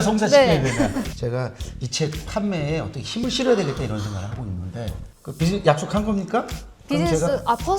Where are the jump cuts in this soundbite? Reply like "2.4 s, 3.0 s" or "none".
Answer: 1.1 s